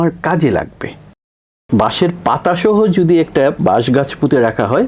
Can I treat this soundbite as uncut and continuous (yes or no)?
no